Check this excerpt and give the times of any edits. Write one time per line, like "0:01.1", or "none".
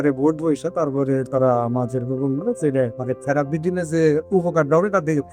0:03.0